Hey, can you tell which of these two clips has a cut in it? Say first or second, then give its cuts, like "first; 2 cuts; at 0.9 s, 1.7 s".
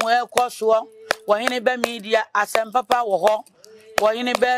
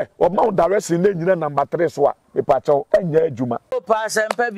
second; 2 cuts; at 2.9 s, 3.6 s